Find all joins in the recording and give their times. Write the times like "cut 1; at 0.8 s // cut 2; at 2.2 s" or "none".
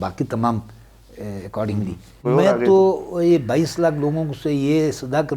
cut 1; at 2.2 s